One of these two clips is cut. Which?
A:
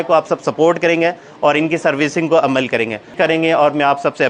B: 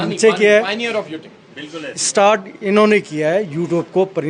A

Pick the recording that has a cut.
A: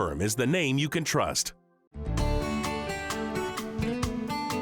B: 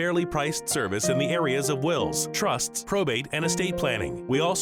A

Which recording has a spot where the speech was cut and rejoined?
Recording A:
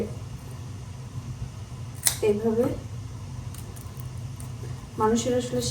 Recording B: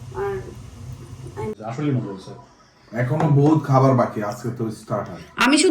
B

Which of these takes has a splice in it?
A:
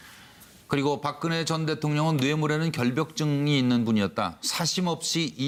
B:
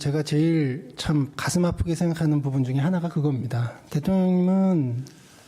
B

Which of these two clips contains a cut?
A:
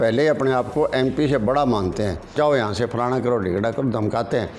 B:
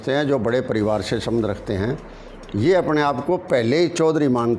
A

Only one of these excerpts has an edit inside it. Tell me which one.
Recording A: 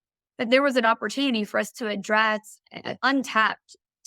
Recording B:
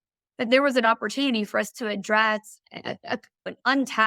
A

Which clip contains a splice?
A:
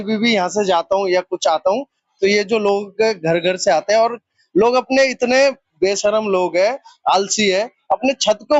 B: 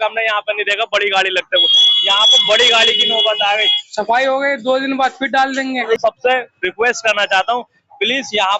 B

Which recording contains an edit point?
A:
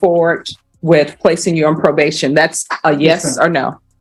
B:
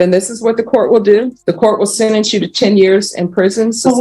B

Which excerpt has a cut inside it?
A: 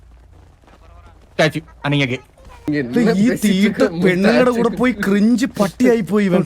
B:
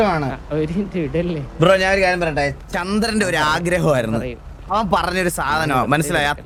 A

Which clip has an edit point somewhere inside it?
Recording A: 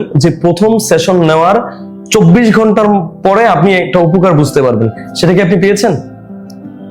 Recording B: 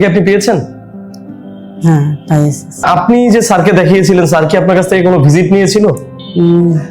B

